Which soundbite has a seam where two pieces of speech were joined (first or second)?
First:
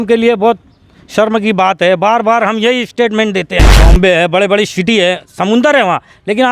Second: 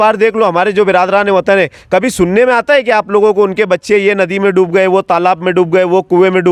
first